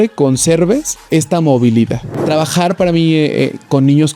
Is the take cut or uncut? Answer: cut